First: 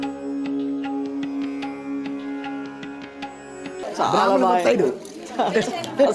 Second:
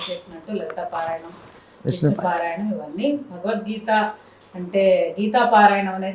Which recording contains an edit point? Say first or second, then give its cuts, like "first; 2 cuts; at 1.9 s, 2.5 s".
first; 1 cut; at 3.8 s